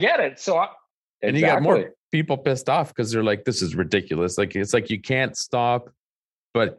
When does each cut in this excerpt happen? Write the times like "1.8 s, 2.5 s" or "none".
none